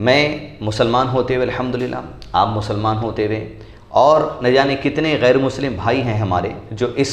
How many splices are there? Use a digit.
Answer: 0